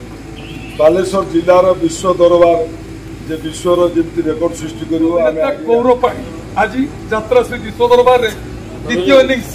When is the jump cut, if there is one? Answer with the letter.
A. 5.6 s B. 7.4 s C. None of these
A